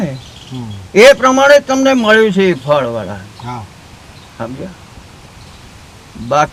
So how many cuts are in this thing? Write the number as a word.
zero